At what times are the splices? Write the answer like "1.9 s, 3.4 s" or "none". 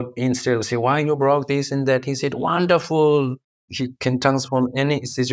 3.5 s